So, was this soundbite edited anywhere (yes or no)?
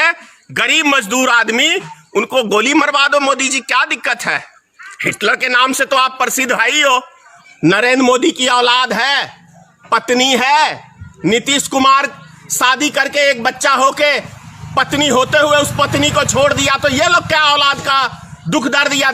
yes